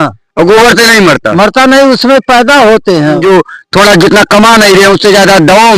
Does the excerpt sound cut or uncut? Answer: cut